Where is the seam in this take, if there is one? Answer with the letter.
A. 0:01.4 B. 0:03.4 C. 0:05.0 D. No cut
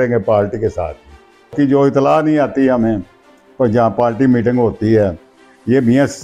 A